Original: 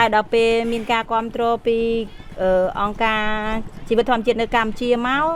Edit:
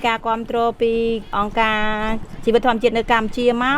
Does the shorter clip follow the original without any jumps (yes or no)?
no